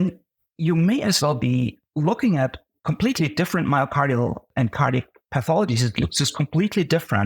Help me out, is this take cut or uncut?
cut